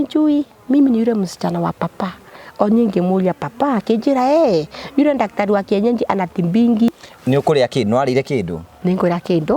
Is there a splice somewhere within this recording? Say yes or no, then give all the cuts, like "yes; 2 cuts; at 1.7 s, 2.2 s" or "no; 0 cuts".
yes; 1 cut; at 7.0 s